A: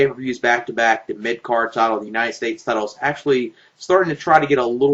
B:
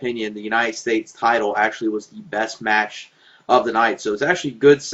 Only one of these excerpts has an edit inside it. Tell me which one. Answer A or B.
A